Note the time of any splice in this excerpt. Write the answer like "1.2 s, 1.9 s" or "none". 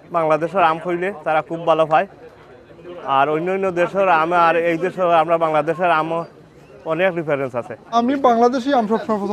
none